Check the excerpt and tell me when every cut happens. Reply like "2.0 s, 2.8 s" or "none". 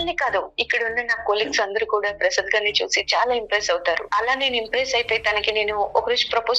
4.0 s